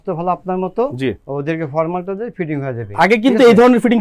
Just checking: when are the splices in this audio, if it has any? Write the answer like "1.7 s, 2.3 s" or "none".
none